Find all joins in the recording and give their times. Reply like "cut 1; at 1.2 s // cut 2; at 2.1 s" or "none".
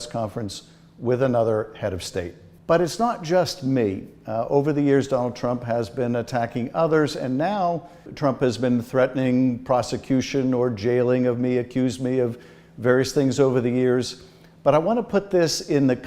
cut 1; at 8.1 s